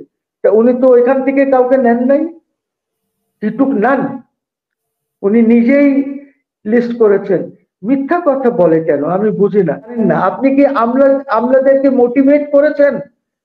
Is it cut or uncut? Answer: cut